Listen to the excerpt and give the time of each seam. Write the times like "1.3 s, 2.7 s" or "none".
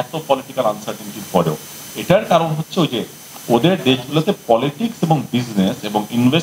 none